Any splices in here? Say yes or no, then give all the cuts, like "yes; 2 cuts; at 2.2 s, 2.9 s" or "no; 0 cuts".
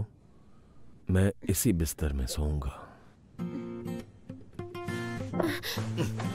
no; 0 cuts